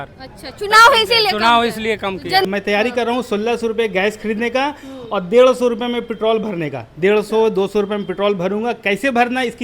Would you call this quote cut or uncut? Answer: cut